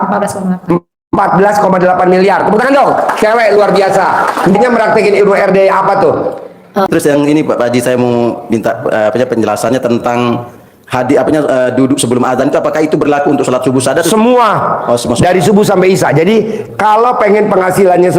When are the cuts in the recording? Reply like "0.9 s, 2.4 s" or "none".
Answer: 6.9 s